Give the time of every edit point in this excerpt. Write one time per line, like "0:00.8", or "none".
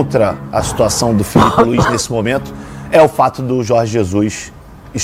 none